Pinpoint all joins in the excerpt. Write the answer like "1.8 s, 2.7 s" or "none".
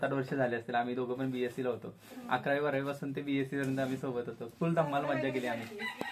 none